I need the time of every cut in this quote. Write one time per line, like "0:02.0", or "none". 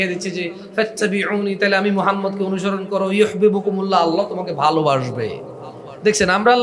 none